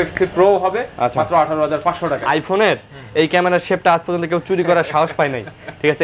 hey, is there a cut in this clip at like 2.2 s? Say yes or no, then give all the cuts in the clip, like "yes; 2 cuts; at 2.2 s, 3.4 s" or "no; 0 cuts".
yes; 1 cut; at 2.2 s